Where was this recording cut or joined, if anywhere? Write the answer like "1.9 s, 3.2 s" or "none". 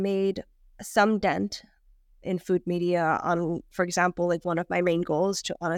none